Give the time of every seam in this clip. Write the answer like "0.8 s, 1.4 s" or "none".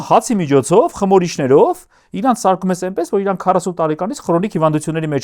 none